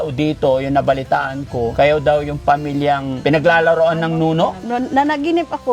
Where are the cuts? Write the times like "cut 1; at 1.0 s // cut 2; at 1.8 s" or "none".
cut 1; at 1.7 s // cut 2; at 3.1 s // cut 3; at 4.6 s